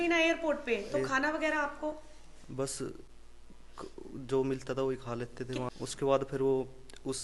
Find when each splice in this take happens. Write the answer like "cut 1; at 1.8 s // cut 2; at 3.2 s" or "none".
cut 1; at 5.7 s